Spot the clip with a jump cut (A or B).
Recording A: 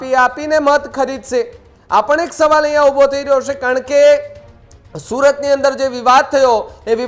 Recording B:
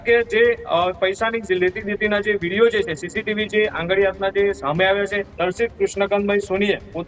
B